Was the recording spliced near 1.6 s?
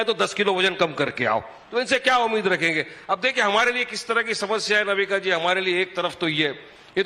no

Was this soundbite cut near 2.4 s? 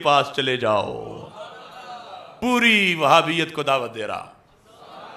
yes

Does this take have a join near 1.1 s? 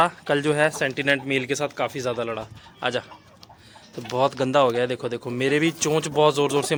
no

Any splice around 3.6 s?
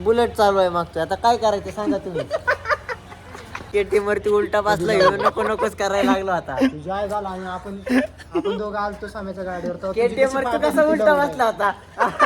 yes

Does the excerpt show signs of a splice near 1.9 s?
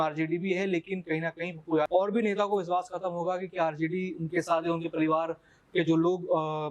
yes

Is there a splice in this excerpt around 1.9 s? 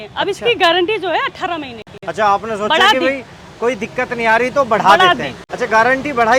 no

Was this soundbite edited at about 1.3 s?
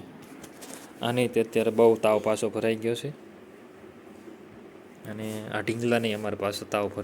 no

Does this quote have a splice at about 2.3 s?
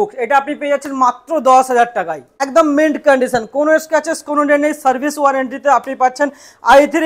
yes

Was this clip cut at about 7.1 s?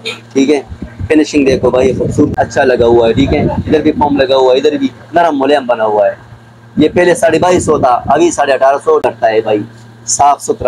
no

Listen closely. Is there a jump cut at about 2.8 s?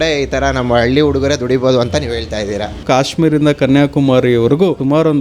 yes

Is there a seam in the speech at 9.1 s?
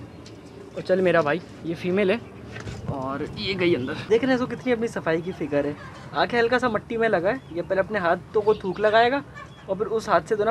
no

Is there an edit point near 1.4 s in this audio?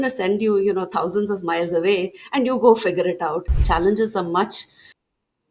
no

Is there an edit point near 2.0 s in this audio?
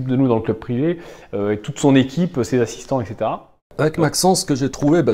no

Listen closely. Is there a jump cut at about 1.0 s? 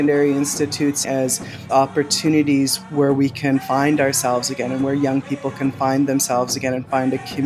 yes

